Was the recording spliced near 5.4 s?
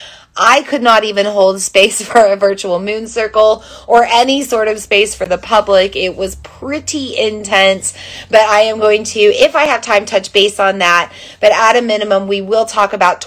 no; 0 cuts

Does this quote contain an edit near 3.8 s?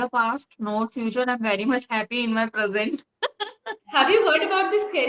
yes; 1 cut; at 3.8 s

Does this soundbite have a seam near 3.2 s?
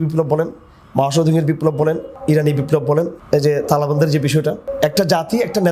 yes; 3 cuts; at 2.1 s, 3.2 s, 4.7 s

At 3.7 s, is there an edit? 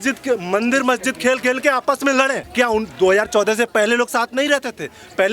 no; 1 cut; at 2.4 s

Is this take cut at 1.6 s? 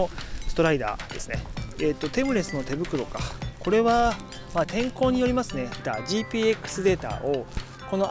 yes; 2 cuts; at 1.6 s, 5.8 s

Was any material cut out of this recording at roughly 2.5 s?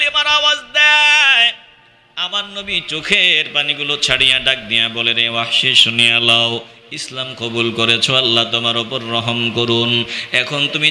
no; 0 cuts

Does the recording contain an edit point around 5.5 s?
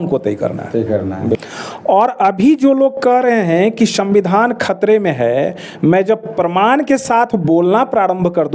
no; 1 cut; at 1.4 s

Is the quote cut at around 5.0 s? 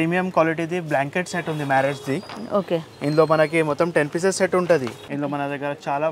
yes; 1 cut; at 5.0 s

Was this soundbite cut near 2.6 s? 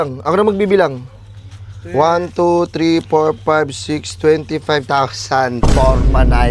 no; 0 cuts

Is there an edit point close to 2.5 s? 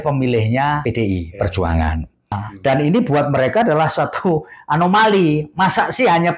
yes; 1 cut; at 2.5 s

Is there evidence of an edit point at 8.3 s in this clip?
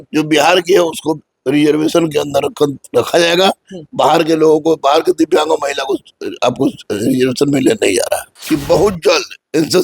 yes; 1 cut; at 8.3 s

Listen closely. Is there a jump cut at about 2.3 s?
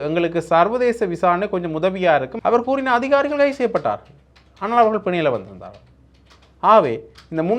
yes; 1 cut; at 2.3 s

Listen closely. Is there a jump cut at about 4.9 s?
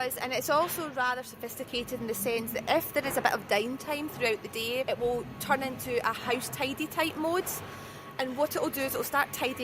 yes; 1 cut; at 4.9 s

